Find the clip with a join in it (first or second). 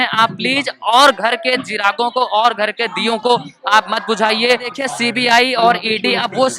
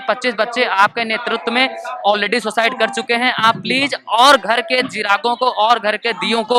first